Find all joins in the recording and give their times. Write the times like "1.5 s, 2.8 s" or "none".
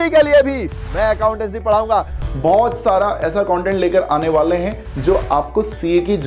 2.2 s